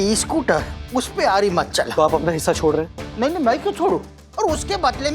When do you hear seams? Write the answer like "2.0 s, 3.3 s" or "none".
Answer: 1.9 s, 4.2 s